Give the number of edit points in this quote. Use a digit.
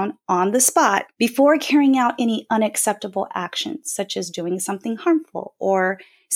1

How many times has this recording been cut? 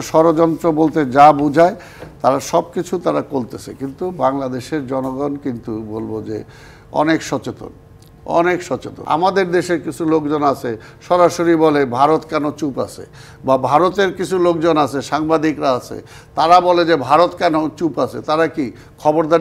1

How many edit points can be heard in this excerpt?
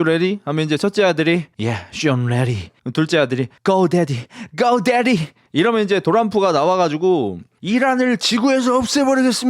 1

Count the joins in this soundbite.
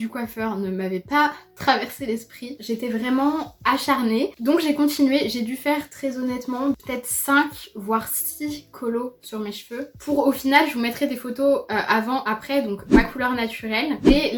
0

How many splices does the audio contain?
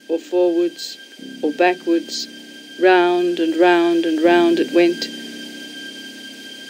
1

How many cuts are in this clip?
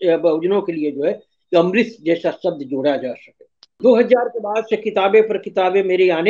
1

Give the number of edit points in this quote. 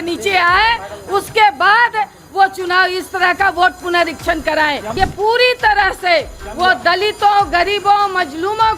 1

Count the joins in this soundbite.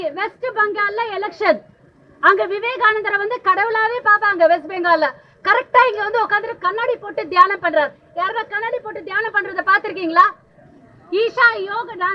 0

